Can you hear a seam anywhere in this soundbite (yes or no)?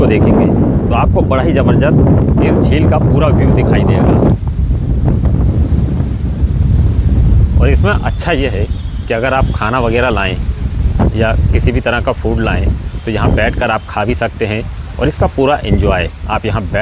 no